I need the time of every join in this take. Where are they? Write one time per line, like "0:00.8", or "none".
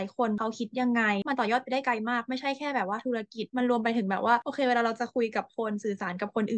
none